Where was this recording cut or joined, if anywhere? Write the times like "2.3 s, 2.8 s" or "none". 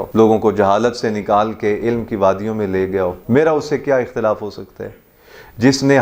none